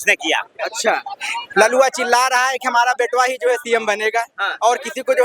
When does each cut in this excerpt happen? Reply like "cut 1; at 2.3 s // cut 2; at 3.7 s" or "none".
cut 1; at 1.5 s